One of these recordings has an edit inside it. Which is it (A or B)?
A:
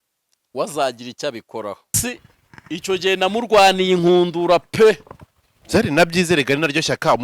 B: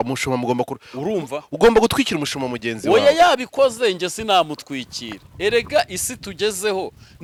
A